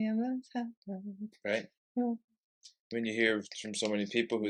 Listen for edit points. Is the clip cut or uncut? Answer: uncut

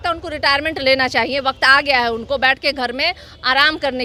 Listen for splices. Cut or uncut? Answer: uncut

